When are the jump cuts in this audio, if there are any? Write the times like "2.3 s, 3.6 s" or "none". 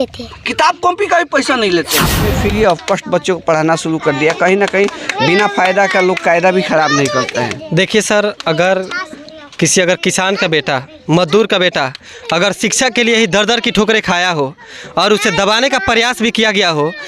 2.1 s